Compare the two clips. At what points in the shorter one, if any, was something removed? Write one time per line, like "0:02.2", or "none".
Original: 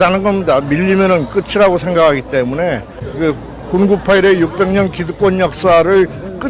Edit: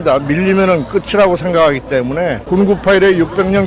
0:02.4